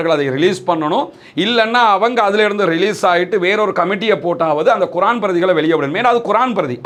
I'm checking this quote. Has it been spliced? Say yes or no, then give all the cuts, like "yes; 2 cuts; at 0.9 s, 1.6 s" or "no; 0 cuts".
no; 0 cuts